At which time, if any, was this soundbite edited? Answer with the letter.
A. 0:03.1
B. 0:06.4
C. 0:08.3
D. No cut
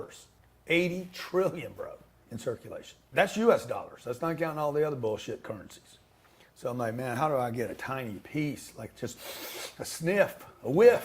A